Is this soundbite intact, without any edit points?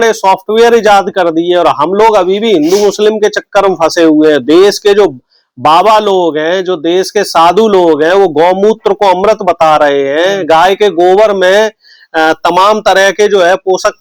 yes; 0 cuts

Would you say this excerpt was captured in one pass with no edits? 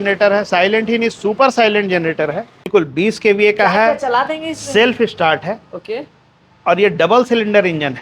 no; 1 cut; at 2.7 s

